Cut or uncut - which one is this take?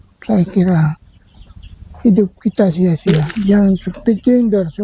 cut